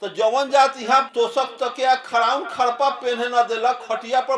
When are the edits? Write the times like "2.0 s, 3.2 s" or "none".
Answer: 1.1 s

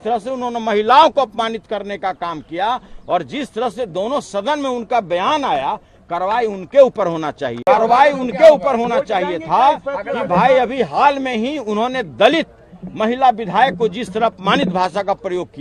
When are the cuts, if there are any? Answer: 7.6 s

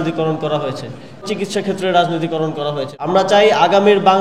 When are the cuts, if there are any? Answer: 1.2 s, 2.9 s

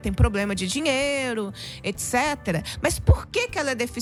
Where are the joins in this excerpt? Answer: none

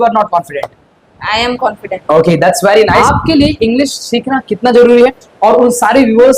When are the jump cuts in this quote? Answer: 3.0 s

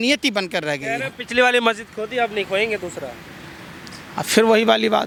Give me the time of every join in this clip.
none

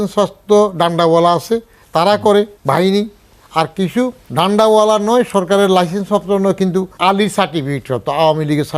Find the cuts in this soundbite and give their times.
2.6 s, 4.2 s, 6.9 s

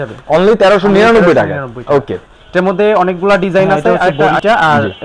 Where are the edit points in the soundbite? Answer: 4.0 s

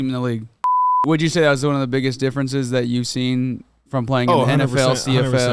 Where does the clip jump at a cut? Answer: 1.0 s

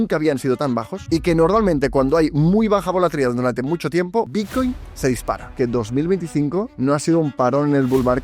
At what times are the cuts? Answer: 0.9 s, 4.3 s, 5.5 s, 6.7 s

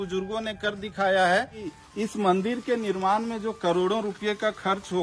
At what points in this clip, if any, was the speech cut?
1.7 s

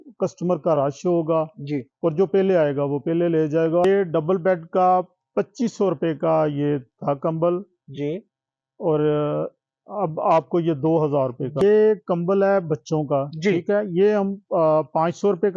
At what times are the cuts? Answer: 3.9 s, 11.5 s

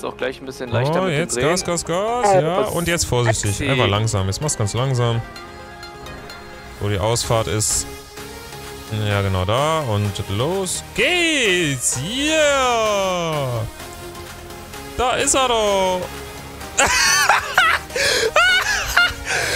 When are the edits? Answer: 16.3 s

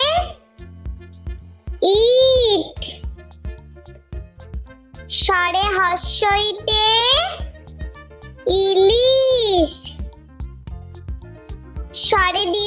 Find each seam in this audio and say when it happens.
3.3 s, 5.3 s

